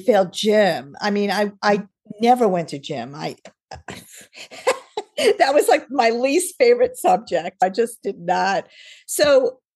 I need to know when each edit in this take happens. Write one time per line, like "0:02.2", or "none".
none

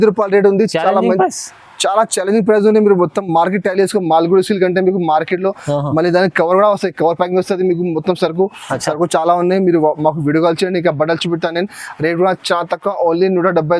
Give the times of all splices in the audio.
none

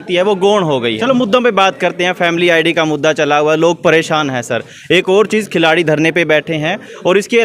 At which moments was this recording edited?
0:01.0

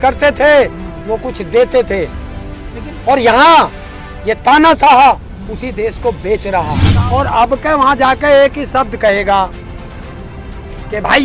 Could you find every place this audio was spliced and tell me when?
0:06.8

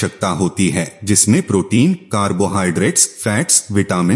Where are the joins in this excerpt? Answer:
0:00.9

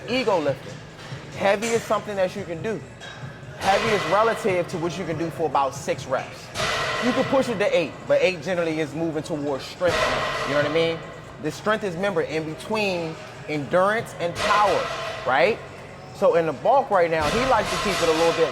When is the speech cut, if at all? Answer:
none

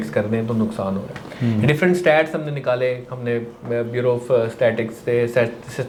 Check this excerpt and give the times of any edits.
none

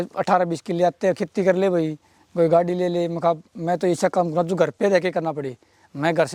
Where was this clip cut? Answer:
none

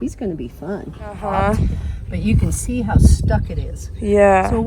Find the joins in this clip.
0:01.2

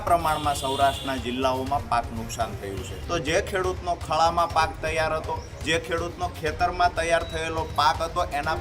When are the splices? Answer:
0:02.9

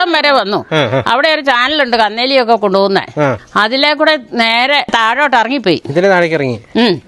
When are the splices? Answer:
0:03.4
0:04.9

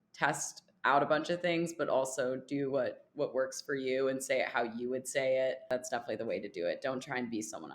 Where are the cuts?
0:05.6

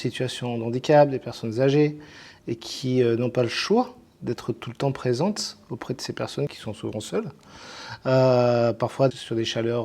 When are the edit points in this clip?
0:06.6
0:09.1

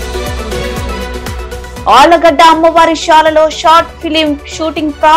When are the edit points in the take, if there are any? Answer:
0:01.6

